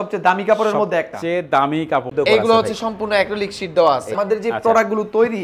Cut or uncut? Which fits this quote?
cut